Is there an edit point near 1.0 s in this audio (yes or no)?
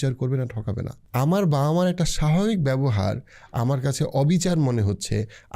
yes